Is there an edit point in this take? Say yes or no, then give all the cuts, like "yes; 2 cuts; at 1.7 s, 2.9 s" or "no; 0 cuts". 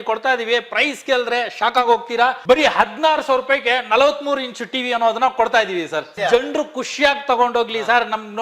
yes; 1 cut; at 6.1 s